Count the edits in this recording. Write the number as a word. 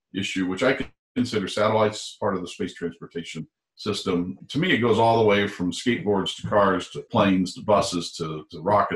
two